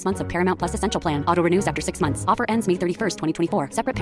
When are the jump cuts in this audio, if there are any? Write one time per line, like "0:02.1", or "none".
none